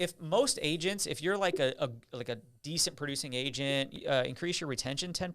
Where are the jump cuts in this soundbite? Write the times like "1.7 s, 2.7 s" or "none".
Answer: 4.0 s